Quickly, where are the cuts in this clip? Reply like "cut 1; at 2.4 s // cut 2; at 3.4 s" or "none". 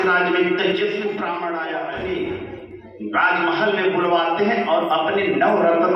cut 1; at 1.7 s